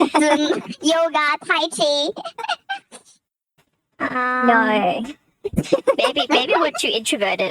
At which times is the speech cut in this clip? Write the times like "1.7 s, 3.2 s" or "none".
none